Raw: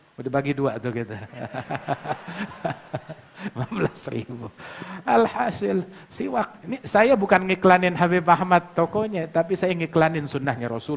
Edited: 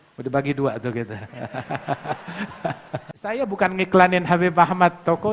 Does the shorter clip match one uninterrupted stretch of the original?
no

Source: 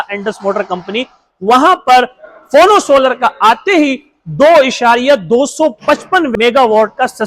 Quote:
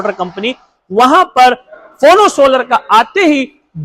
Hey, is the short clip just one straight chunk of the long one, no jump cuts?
yes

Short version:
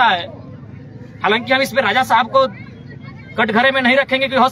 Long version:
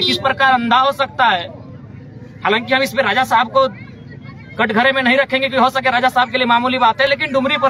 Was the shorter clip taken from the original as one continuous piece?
yes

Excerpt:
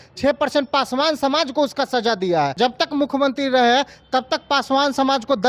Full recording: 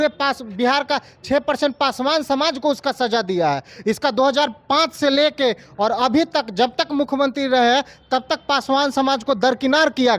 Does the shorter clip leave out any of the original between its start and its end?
yes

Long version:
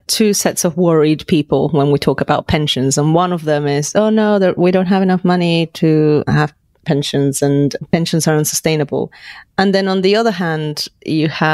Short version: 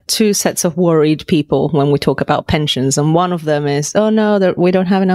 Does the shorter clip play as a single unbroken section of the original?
yes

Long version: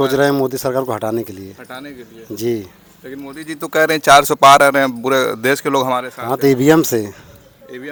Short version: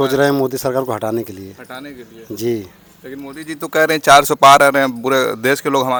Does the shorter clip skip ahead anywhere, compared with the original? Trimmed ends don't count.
no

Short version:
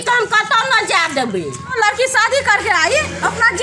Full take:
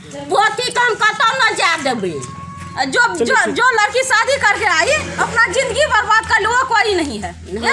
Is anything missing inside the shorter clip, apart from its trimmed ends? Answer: yes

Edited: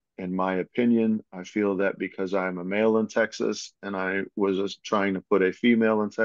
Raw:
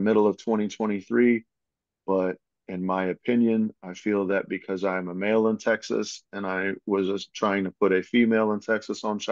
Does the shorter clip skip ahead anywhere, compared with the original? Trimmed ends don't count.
no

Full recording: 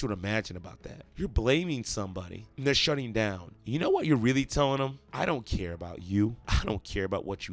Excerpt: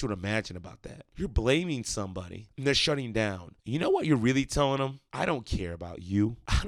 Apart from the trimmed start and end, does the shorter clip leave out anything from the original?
no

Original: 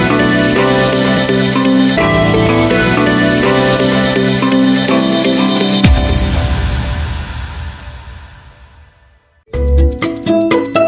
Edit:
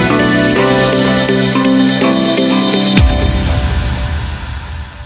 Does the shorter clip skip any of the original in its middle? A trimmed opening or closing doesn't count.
yes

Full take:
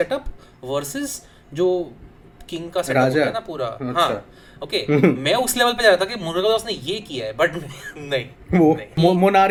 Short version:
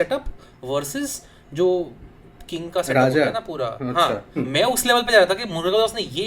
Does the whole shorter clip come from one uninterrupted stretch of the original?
no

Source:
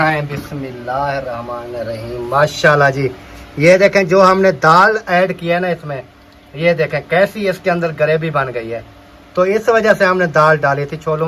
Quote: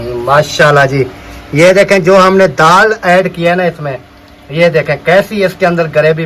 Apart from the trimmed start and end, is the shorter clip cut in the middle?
no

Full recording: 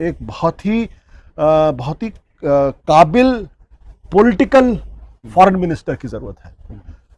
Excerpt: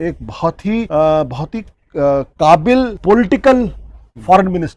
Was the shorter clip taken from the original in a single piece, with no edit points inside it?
no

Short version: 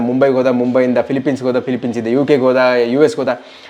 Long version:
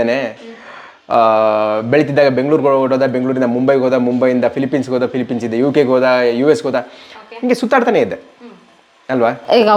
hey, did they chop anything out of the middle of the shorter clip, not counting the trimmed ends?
no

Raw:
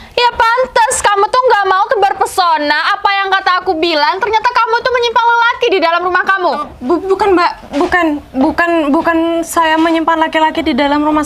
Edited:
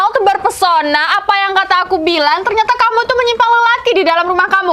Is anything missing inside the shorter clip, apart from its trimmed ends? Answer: no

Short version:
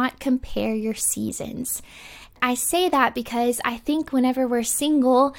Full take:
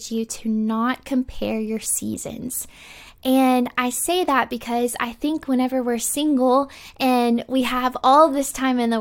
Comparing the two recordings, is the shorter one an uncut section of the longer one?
no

